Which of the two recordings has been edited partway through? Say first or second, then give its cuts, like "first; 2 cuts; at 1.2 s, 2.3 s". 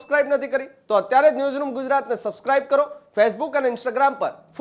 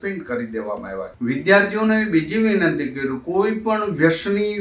second; 1 cut; at 1.1 s